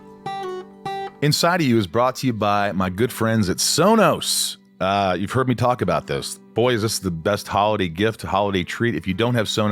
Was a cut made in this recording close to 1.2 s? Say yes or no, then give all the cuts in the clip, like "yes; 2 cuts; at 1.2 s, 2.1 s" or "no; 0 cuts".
yes; 1 cut; at 1.2 s